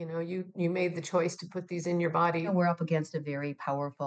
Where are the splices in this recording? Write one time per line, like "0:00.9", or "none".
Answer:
0:02.5